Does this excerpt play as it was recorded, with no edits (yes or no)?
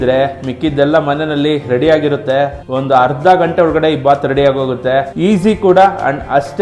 yes